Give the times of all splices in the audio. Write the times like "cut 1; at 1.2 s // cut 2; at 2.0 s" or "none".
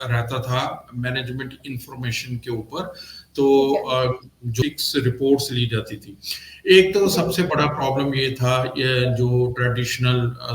cut 1; at 4.5 s